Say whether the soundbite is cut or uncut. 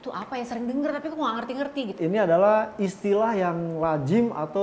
cut